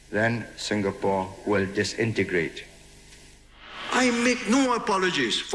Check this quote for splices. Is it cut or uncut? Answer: cut